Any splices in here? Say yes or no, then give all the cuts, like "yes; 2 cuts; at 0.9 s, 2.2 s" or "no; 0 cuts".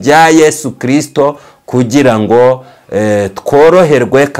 no; 0 cuts